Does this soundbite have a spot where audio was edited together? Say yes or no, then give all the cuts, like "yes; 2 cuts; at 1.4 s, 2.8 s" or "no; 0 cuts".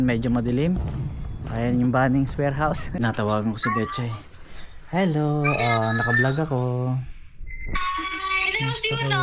yes; 1 cut; at 3.0 s